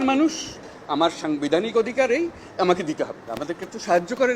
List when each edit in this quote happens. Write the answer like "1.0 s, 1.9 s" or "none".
3.3 s